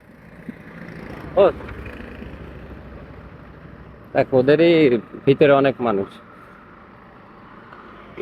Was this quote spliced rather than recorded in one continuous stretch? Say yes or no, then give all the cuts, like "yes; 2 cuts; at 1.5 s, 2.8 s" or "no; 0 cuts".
no; 0 cuts